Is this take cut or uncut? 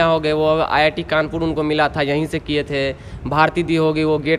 uncut